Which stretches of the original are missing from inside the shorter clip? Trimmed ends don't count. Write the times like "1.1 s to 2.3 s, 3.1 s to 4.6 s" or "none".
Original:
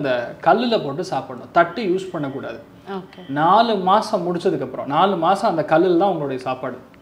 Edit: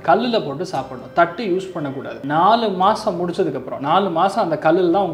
2.5 s to 3.2 s

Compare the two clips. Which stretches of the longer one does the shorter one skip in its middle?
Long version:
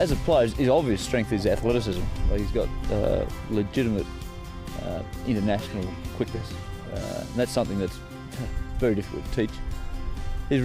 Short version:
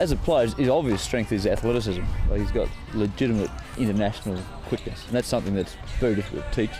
2.8 s to 3.4 s, 4.2 s to 5.1 s, 6.5 s to 7.3 s, 8.1 s to 8.6 s

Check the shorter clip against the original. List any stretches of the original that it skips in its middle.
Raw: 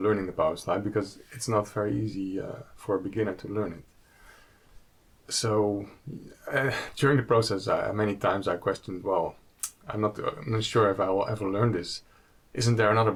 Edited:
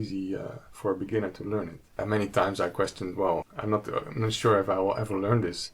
4.0 s to 7.9 s, 9.4 s to 9.8 s

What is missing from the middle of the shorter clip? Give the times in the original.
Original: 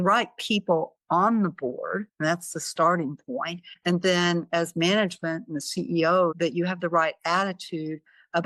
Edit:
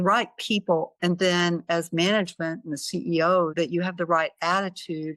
0.9 s to 3.8 s

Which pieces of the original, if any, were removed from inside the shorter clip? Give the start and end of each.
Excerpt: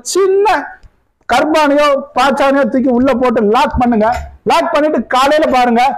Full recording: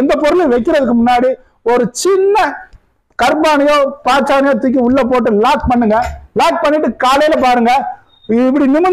none

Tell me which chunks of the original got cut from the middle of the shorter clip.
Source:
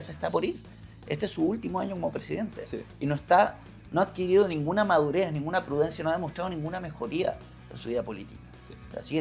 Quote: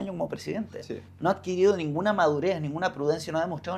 2.8 s to 3.7 s

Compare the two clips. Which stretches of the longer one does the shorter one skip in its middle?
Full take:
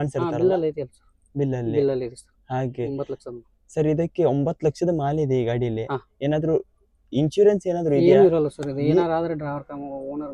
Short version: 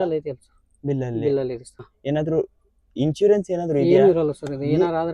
2.4 s to 6.1 s

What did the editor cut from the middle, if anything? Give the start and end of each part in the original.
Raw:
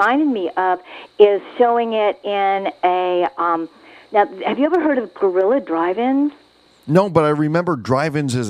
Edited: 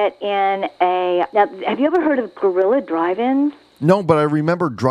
3.3 s to 4.1 s, 6.5 s to 6.7 s

